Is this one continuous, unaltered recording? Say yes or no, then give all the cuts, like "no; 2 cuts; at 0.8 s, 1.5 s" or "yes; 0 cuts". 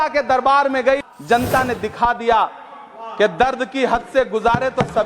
no; 1 cut; at 1.0 s